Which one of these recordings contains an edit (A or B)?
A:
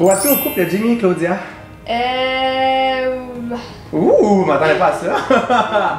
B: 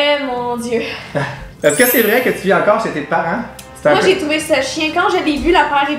B